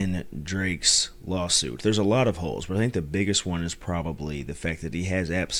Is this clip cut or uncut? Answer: uncut